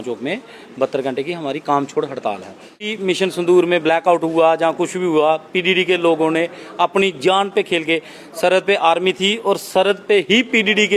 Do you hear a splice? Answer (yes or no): yes